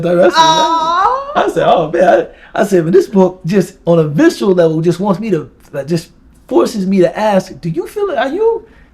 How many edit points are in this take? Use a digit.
0